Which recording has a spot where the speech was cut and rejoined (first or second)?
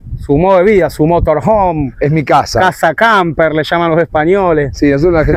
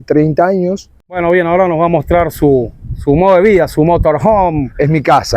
second